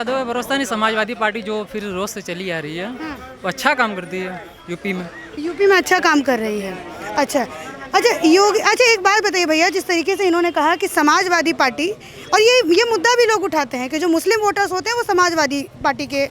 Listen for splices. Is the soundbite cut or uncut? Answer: uncut